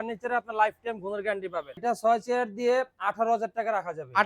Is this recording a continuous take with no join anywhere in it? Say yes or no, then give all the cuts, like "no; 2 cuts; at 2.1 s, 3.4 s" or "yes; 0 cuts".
no; 1 cut; at 1.8 s